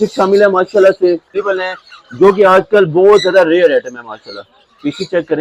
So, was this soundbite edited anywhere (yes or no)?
yes